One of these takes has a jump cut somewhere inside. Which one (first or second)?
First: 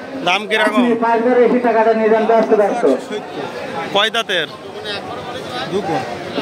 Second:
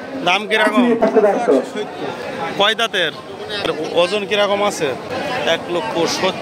second